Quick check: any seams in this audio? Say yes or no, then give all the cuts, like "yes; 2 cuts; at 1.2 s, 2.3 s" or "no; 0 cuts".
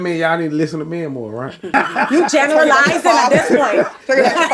yes; 1 cut; at 1.7 s